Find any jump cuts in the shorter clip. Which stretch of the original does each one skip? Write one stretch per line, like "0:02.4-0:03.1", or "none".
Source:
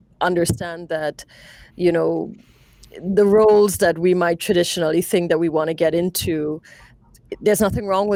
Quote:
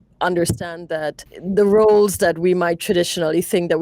0:01.3-0:02.9